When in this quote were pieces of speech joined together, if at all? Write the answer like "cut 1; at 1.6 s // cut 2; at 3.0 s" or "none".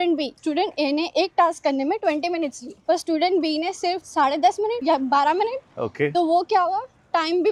none